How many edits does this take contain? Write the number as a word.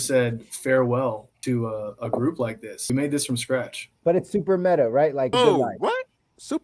four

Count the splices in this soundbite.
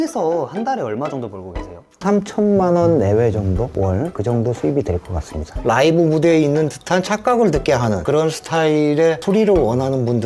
two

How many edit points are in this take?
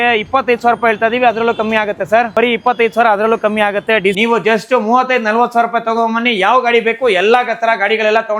two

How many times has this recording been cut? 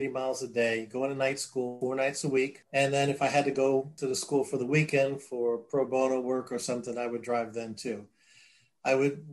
three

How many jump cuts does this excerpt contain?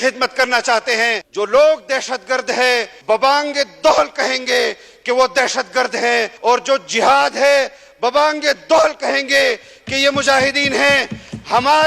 three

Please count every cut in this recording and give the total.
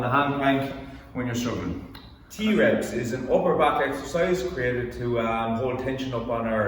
one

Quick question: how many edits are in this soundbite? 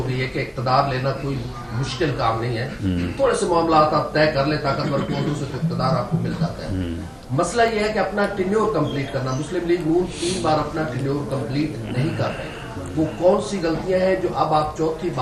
zero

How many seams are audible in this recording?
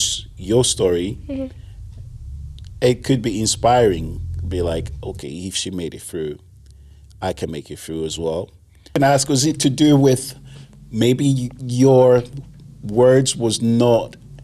one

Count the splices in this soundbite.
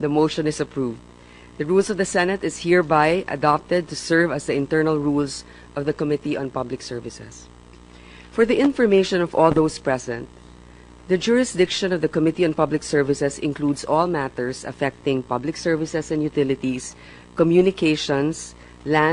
zero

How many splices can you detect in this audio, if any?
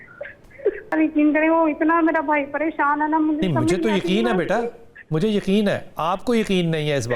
one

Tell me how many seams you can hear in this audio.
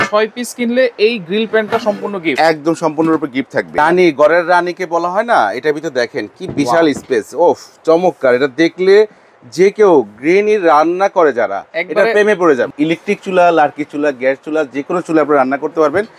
two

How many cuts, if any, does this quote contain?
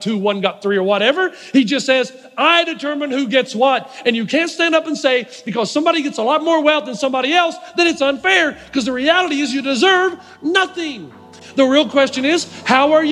one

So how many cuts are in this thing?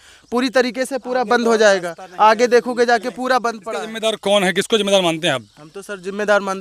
one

